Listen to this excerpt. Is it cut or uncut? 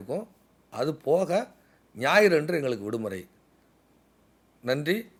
uncut